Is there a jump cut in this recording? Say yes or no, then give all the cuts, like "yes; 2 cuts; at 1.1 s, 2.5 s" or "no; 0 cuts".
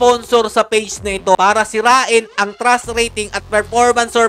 yes; 1 cut; at 1.4 s